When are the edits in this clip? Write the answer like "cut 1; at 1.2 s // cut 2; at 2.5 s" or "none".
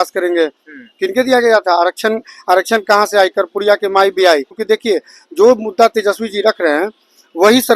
cut 1; at 4.5 s

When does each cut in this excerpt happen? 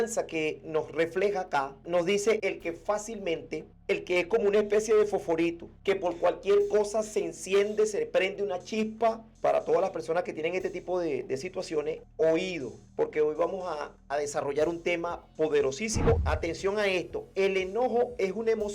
cut 1; at 9.3 s // cut 2; at 16.2 s

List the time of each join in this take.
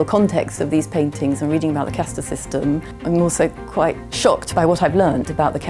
cut 1; at 2.9 s // cut 2; at 4.3 s

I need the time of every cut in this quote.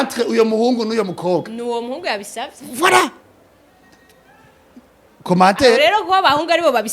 none

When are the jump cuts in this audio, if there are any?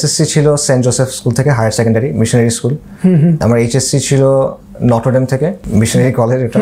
cut 1; at 3.4 s // cut 2; at 5.6 s

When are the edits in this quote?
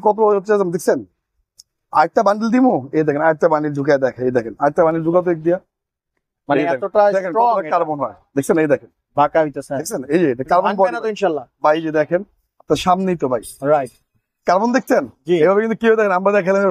none

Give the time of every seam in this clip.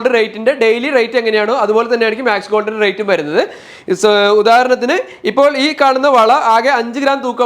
none

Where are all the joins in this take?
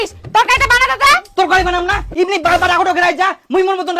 none

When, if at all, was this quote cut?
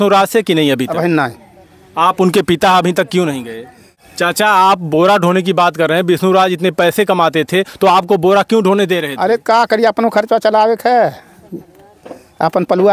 cut 1; at 3.9 s

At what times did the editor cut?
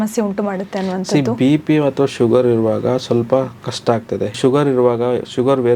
cut 1; at 4.4 s

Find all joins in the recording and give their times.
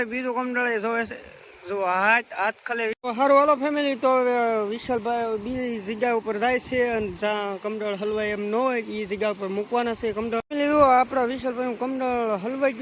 cut 1; at 3.0 s // cut 2; at 10.4 s

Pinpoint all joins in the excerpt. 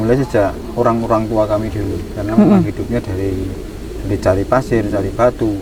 none

